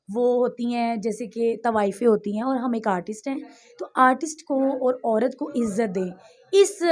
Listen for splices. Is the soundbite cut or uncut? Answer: uncut